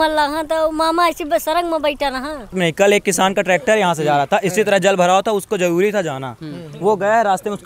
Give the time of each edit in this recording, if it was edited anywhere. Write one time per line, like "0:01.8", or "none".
0:02.6